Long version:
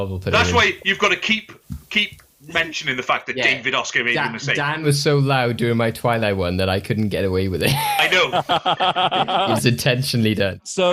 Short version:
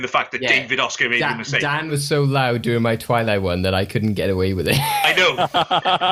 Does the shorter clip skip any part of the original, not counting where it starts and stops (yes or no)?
no